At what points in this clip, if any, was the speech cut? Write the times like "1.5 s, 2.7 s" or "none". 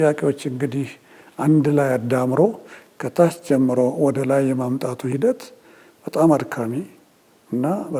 none